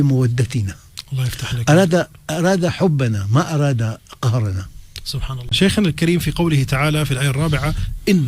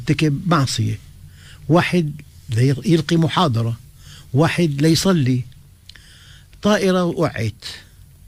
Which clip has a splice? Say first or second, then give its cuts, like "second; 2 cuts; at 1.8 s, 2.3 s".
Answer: first; 1 cut; at 5.5 s